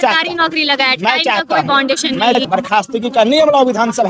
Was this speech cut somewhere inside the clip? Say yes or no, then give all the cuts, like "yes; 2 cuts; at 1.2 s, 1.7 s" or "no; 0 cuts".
yes; 1 cut; at 2.4 s